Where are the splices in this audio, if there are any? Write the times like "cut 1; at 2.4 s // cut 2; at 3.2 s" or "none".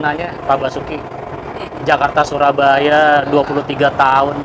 none